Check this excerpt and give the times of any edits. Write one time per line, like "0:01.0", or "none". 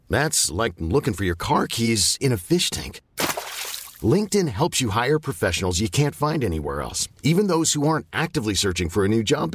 none